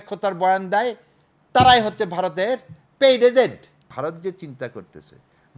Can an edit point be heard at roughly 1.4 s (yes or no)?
no